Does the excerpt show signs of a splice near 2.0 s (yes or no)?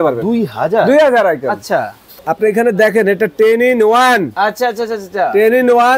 yes